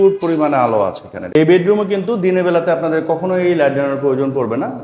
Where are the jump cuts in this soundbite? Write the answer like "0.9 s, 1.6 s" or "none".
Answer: 1.3 s